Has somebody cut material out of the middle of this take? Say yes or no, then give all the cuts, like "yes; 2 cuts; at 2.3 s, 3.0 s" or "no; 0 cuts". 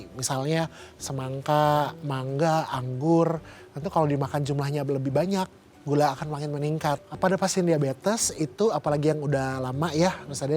yes; 1 cut; at 7.1 s